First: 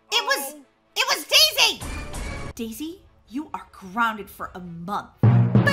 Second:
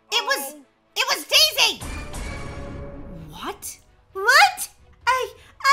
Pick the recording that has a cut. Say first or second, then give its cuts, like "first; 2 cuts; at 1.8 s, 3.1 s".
first; 1 cut; at 2.5 s